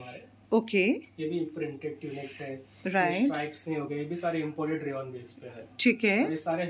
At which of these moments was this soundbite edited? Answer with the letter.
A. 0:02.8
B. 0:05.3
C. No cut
C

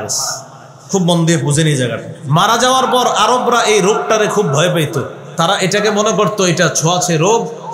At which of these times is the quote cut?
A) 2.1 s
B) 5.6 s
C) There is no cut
A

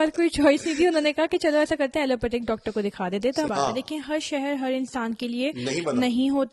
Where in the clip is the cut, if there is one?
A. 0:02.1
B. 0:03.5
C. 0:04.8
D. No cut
B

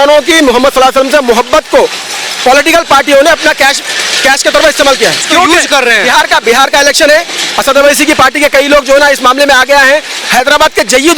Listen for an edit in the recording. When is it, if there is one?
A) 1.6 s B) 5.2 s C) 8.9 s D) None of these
B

